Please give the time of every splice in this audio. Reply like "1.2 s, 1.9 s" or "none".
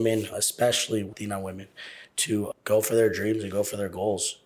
1.1 s